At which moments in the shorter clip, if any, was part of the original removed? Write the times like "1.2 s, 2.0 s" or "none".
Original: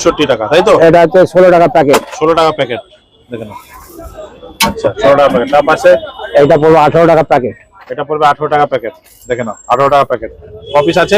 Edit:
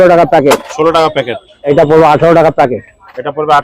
1.7 s